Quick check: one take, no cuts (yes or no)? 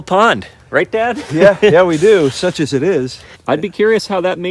no